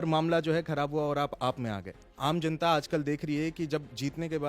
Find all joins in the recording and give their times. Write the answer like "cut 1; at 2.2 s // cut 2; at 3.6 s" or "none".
cut 1; at 2.1 s